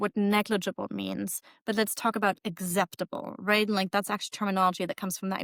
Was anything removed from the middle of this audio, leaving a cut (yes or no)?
no